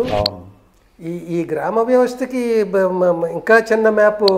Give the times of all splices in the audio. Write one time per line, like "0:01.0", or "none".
none